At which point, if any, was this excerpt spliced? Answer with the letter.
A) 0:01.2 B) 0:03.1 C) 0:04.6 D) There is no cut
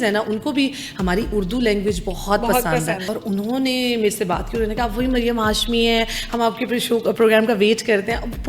B